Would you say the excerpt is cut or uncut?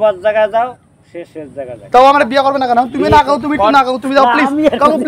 uncut